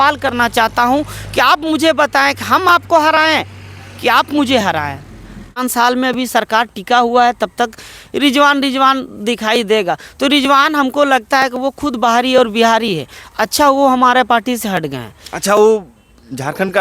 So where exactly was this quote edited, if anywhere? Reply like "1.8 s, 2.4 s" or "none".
5.6 s